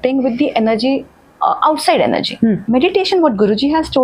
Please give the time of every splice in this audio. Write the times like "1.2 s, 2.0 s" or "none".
2.6 s